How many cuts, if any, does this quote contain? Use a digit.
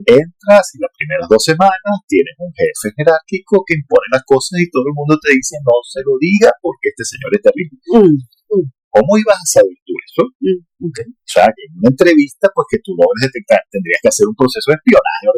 0